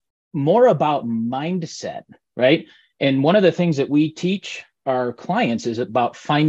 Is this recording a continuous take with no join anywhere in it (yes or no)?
yes